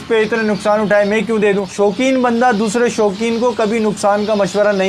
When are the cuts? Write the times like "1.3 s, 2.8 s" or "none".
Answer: 1.7 s